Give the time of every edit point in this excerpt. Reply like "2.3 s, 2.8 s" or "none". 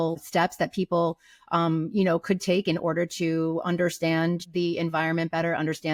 none